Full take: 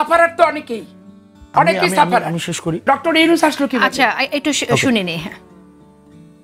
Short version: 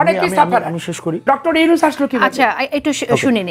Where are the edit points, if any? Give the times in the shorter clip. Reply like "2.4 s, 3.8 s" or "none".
none

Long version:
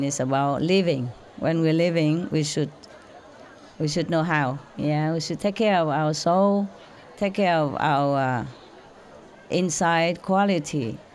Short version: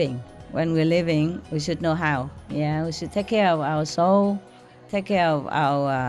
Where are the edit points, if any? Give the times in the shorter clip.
1.4 s

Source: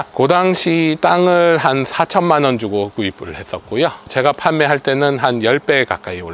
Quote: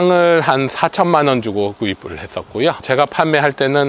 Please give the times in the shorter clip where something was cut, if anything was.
2.8 s

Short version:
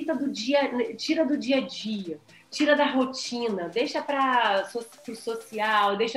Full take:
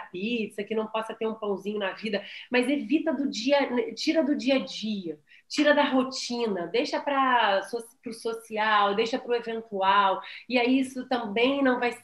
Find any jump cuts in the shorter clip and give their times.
none

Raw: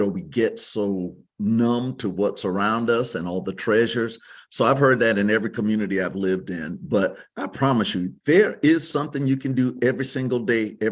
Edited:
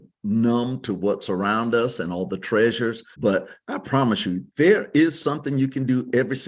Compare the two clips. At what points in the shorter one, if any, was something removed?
3.1 s

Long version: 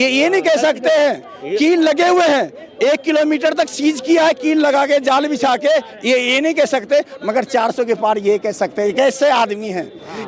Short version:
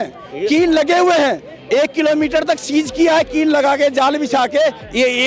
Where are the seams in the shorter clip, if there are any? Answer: none

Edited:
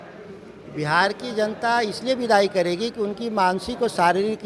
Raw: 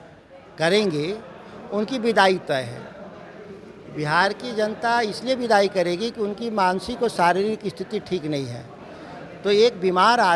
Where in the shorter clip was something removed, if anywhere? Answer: none

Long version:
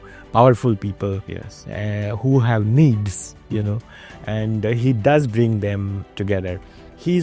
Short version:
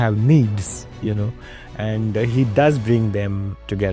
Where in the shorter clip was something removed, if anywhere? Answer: none

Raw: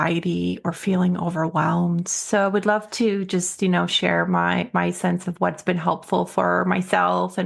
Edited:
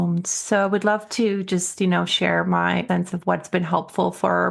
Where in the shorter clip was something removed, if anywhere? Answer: 2.8 s

